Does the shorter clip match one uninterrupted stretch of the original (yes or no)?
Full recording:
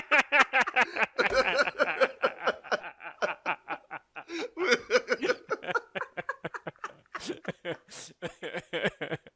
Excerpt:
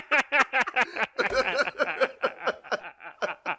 yes